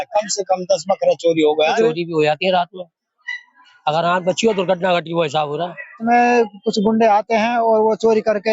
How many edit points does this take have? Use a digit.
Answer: 2